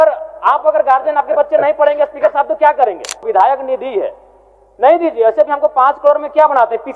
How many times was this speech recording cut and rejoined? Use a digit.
1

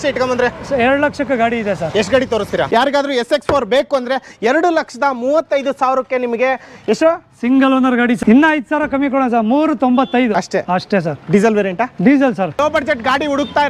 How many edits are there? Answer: 3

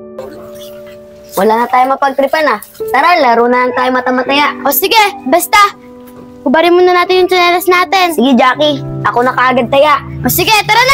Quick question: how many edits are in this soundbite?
1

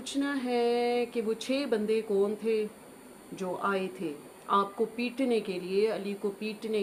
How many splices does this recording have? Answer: 0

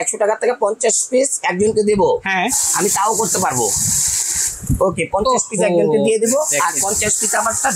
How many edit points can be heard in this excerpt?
0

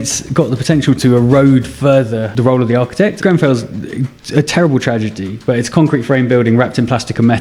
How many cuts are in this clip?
2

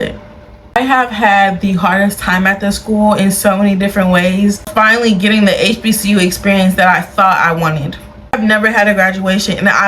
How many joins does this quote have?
3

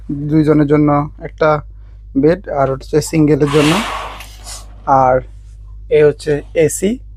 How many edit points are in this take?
0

